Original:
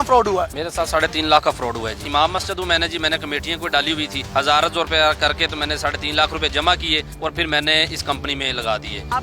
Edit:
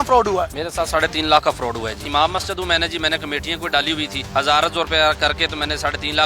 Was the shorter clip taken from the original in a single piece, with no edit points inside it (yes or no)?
yes